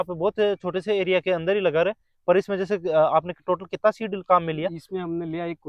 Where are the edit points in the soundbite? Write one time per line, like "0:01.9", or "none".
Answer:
none